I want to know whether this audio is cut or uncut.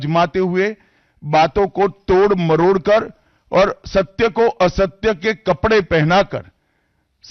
uncut